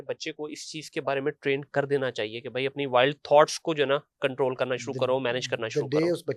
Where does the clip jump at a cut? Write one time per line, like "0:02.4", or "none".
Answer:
none

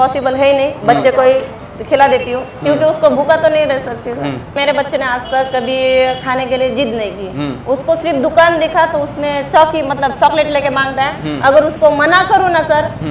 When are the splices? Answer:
0:04.6

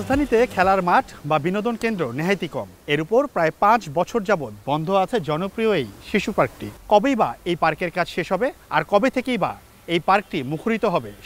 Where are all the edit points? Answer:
0:02.7
0:06.7
0:08.6

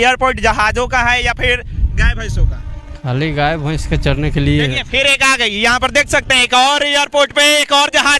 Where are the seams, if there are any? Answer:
none

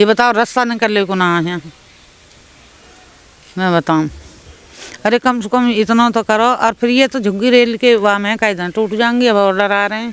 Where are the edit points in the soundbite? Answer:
none

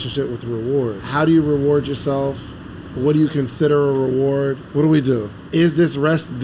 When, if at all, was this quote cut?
0:01.0
0:04.6
0:05.4

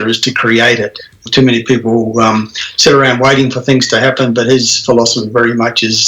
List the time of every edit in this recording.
0:01.2

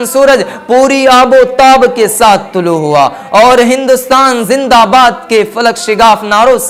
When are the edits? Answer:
none

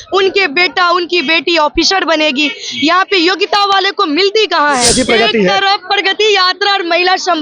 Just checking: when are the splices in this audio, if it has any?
0:04.9

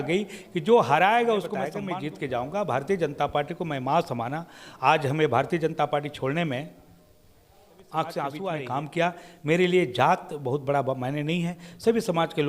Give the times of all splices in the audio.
0:01.8
0:08.5

